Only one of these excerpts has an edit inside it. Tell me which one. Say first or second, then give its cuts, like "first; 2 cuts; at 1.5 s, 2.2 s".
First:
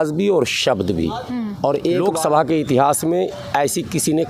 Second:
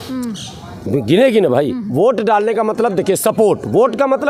first; 1 cut; at 2.0 s